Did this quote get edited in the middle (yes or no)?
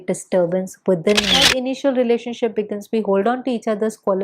yes